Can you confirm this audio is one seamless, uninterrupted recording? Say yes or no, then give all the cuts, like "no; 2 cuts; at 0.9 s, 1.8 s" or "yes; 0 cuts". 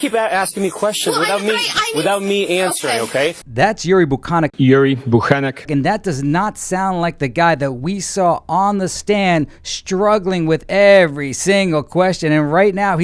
yes; 0 cuts